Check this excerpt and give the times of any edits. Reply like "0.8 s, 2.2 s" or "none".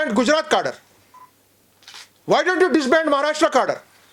2.1 s